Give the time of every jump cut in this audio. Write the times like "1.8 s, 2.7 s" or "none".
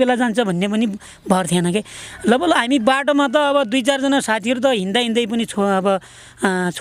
none